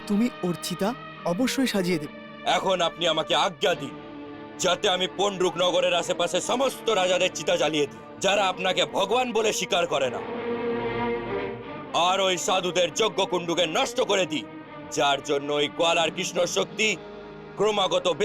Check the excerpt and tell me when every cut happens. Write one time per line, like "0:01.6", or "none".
0:02.2
0:10.2
0:11.5